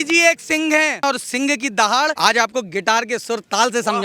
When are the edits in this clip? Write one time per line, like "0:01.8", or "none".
0:01.0
0:02.1